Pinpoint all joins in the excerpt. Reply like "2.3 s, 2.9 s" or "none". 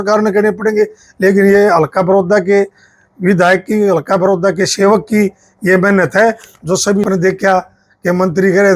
7.1 s